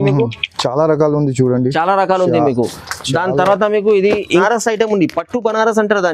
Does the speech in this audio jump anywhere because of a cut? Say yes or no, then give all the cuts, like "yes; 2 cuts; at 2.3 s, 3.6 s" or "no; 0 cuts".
yes; 1 cut; at 4.4 s